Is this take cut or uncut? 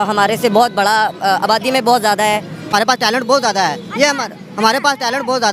cut